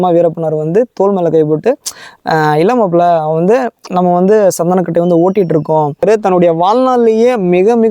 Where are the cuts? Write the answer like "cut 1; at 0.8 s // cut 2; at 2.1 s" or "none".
cut 1; at 6.0 s